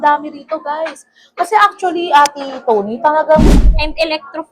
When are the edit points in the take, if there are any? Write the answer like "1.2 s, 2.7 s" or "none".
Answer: 3.6 s